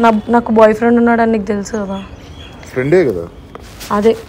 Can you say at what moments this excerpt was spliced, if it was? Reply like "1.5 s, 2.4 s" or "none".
none